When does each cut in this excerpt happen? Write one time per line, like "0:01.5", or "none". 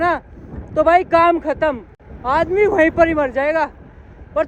none

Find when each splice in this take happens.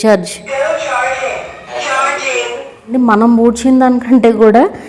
0:01.7
0:02.9

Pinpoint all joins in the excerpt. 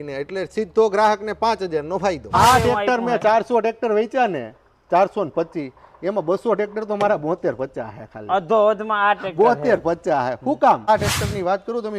0:02.3
0:10.9

